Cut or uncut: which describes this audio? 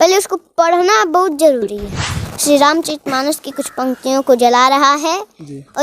cut